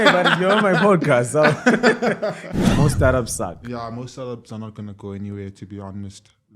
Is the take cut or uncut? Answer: cut